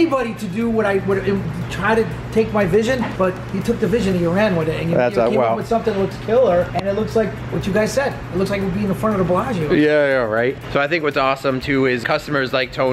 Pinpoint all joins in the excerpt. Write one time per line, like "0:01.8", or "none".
none